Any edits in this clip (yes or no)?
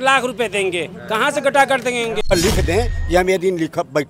yes